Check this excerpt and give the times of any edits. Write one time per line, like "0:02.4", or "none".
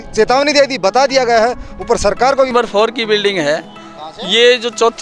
0:02.5